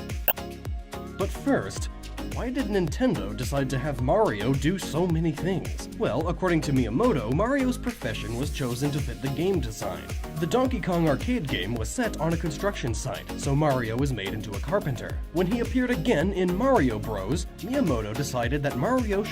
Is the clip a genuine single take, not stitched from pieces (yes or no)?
yes